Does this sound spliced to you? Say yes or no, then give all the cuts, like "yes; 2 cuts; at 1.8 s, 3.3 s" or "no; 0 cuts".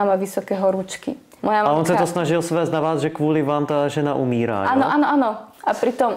yes; 1 cut; at 1.3 s